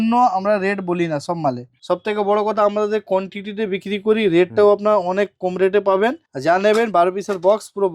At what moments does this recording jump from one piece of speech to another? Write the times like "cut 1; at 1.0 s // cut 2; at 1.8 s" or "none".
cut 1; at 1.7 s // cut 2; at 6.3 s